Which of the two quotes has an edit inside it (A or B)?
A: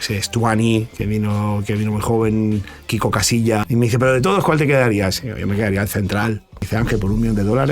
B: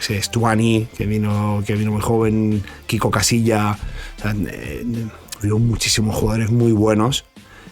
A